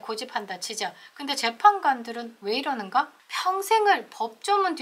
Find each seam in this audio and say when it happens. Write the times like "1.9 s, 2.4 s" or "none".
3.2 s